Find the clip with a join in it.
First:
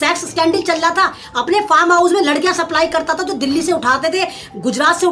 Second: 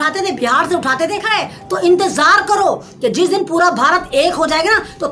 second; 1 cut; at 1.2 s

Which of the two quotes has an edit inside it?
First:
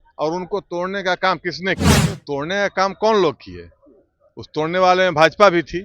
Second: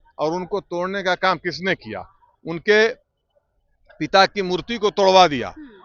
first; 1 cut; at 2.1 s

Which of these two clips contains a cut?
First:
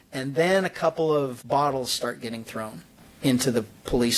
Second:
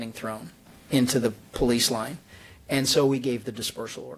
first; 1 cut; at 1.4 s

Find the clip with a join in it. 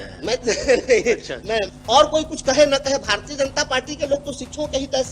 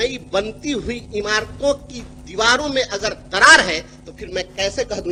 first; 1 cut; at 1.7 s

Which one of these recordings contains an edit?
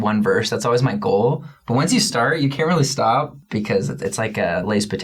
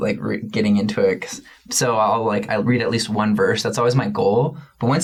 first; 1 cut; at 3.4 s

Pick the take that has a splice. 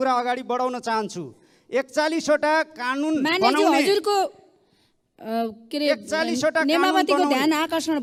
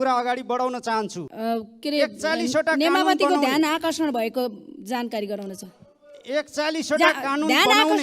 second; 1 cut; at 1.2 s

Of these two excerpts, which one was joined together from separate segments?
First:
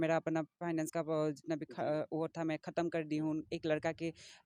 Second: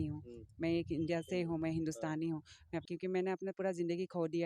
second; 1 cut; at 2.8 s

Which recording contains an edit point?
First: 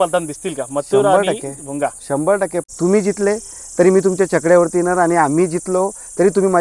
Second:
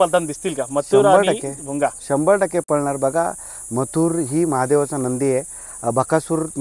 first; 1 cut; at 2.7 s

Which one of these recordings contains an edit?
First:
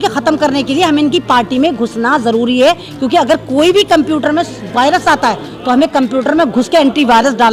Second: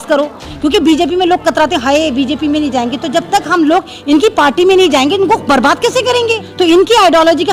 second; 1 cut; at 6.4 s

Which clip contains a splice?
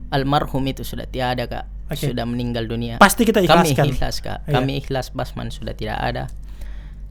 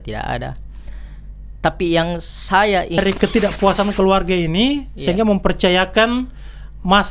second; 1 cut; at 3.0 s

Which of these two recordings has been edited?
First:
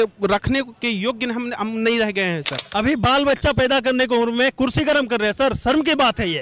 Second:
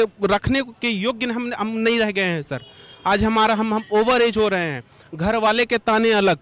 first; 1 cut; at 2.6 s

